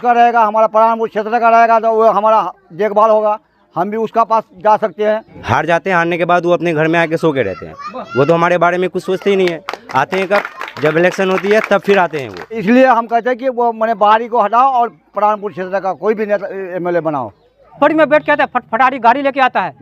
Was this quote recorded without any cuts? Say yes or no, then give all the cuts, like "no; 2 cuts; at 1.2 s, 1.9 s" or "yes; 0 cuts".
no; 3 cuts; at 5.3 s, 12.6 s, 17.8 s